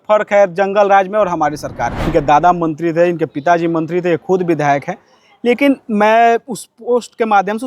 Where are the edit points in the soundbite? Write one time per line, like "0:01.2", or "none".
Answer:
0:02.0